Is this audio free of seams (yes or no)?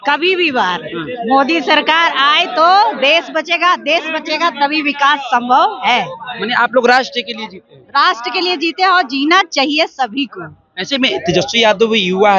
yes